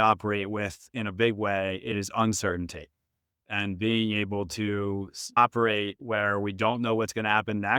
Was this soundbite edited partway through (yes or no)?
yes